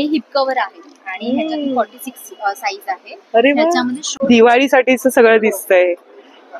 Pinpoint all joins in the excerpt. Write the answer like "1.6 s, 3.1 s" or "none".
4.1 s